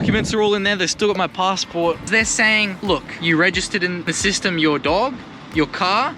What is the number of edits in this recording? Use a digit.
3